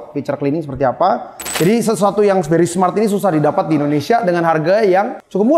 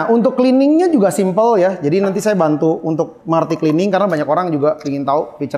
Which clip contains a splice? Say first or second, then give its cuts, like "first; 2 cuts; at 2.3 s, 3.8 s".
first; 1 cut; at 1.5 s